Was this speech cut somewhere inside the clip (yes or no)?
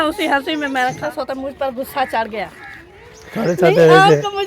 yes